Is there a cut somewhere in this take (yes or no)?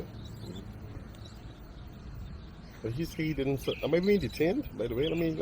yes